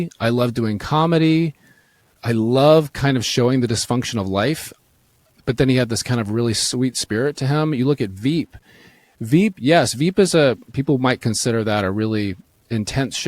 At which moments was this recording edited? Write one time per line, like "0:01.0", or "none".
0:02.0
0:05.2